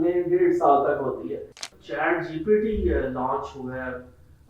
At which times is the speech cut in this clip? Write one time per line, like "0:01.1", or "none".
0:01.7